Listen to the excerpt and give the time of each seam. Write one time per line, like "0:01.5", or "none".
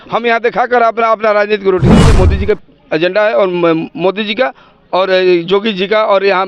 0:02.1